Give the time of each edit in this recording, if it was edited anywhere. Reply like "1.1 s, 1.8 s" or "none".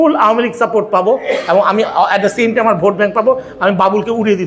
none